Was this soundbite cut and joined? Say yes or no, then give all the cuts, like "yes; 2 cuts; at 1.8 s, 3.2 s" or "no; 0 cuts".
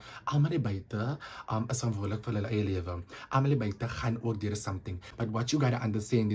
yes; 1 cut; at 5.0 s